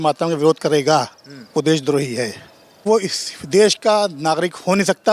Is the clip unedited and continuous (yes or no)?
no